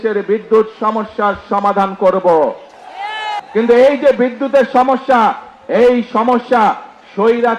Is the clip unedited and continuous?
no; 1 cut; at 3.3 s

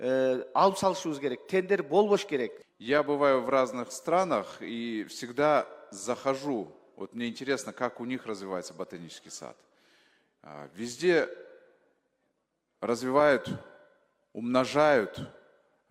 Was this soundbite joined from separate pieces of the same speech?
yes; 1 cut; at 2.6 s

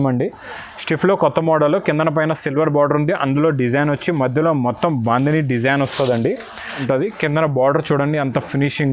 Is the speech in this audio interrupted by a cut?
yes; 1 cut; at 6.8 s

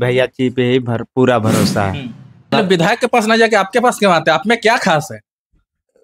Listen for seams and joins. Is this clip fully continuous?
no; 1 cut; at 2.5 s

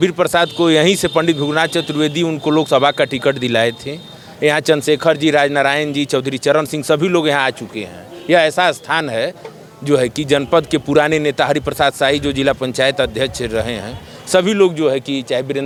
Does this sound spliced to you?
no; 0 cuts

